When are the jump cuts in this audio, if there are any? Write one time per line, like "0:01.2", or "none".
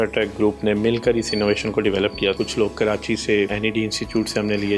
0:02.4
0:03.5